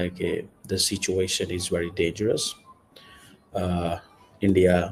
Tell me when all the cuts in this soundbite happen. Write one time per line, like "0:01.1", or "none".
none